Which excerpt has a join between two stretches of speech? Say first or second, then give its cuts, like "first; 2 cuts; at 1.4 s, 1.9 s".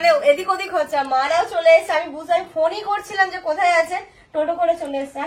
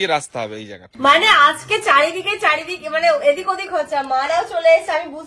second; 1 cut; at 0.9 s